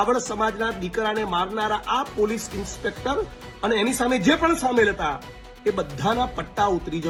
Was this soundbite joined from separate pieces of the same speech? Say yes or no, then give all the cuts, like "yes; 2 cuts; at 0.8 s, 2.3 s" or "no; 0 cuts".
no; 0 cuts